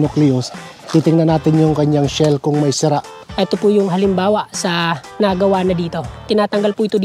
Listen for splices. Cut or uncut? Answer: cut